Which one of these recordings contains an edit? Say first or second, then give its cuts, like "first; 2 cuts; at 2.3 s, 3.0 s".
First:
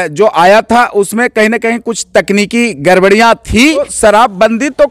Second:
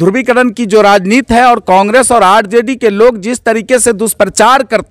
first; 1 cut; at 3.9 s